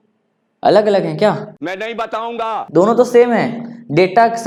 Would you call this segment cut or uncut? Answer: uncut